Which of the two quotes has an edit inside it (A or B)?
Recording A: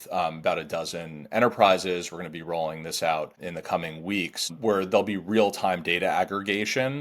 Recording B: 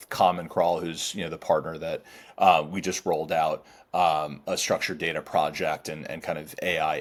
A